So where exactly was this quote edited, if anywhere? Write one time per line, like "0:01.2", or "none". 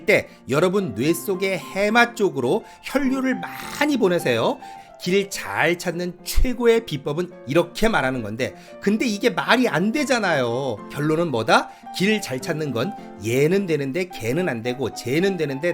0:04.8
0:07.3
0:10.8